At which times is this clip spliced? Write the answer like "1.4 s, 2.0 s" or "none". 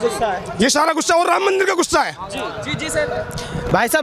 none

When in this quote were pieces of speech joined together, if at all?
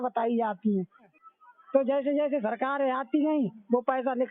1.1 s

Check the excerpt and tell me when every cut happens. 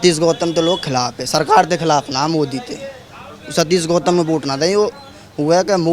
none

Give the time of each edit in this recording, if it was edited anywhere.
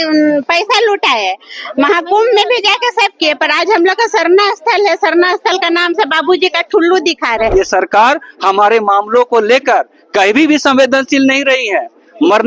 7.5 s

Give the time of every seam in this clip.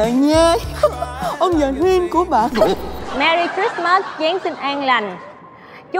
3.0 s

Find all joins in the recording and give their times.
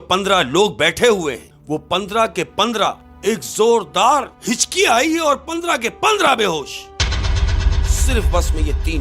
1.5 s, 3.1 s, 4.3 s

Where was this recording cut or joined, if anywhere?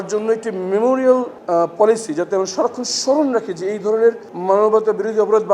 1.3 s, 4.3 s

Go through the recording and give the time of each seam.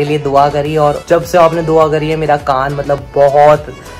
1.0 s

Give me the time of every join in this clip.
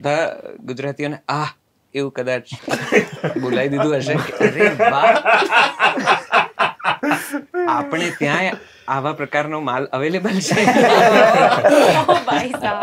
2.6 s

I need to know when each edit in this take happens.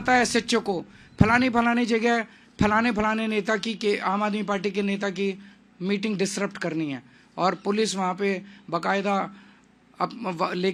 none

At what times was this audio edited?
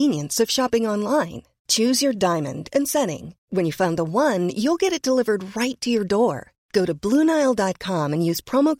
none

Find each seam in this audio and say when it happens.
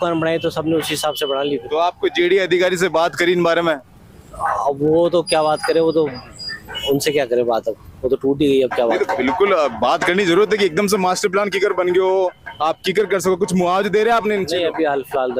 none

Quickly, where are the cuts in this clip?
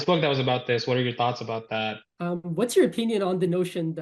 2.0 s

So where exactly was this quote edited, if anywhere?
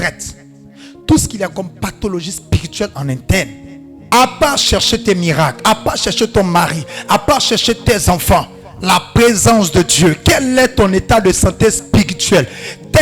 4.0 s

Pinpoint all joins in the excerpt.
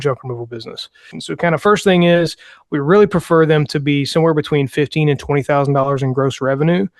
1.2 s

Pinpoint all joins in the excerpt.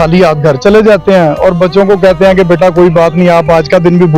none

